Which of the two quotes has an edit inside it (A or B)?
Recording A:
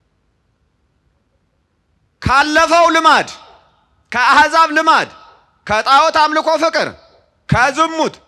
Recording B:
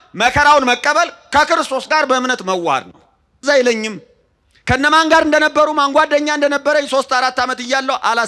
B